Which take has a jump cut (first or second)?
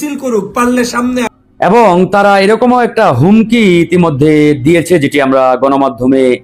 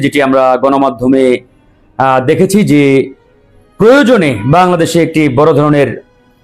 first